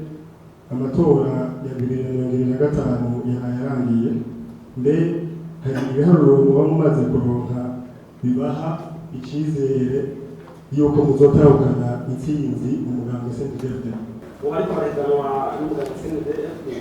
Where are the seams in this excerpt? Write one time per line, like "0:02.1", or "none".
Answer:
0:14.2